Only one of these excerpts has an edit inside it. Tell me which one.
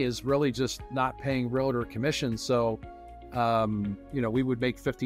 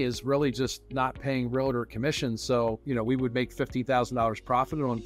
second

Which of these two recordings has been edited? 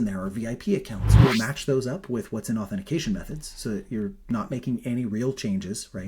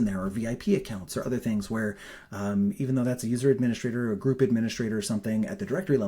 first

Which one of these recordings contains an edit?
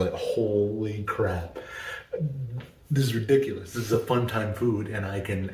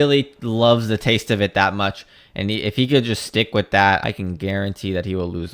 second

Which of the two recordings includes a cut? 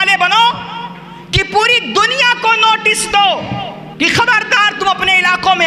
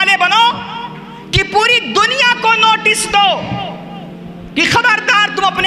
first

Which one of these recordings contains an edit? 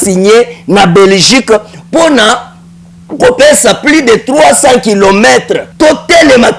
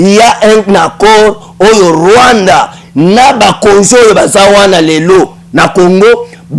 first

